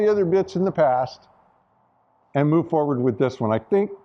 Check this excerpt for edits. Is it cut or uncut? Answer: uncut